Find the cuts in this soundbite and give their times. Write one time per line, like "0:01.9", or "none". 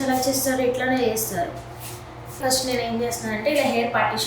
0:02.4